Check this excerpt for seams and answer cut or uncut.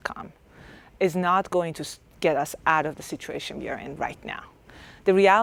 uncut